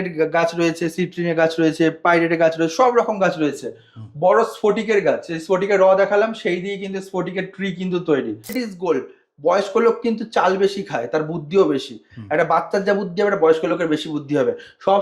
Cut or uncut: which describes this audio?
cut